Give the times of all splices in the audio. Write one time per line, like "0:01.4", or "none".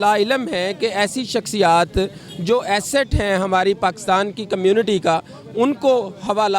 none